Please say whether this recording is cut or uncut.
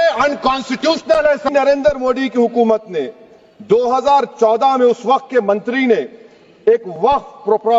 cut